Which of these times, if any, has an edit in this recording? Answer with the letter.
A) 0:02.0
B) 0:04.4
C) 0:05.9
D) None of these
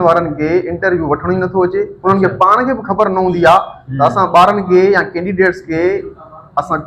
D